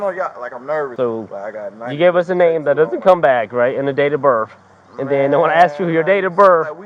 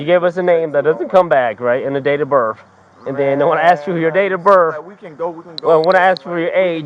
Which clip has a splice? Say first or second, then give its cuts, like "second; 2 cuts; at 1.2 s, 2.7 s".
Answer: first; 1 cut; at 0.9 s